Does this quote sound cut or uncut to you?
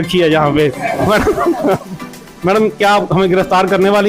uncut